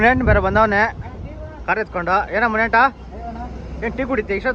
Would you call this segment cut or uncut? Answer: uncut